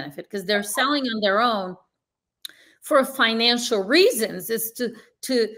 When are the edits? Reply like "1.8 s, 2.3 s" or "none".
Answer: none

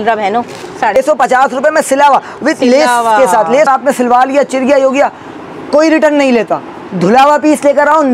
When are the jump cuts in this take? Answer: 1.0 s, 3.7 s

